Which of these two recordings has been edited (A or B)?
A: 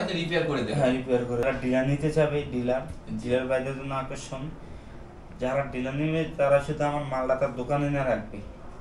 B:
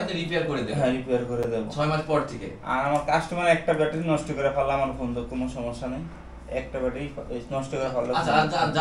A